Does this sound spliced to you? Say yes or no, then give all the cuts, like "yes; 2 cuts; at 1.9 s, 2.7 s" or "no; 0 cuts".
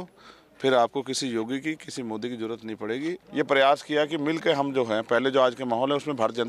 yes; 1 cut; at 3.2 s